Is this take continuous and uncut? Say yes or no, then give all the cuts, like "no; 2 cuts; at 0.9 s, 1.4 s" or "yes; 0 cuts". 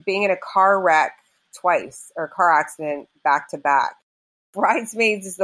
no; 1 cut; at 4.5 s